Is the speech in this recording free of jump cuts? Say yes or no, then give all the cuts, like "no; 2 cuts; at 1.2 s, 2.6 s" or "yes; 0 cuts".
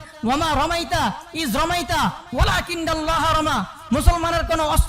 yes; 0 cuts